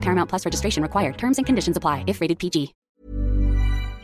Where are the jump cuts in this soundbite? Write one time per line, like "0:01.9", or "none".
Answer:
0:02.9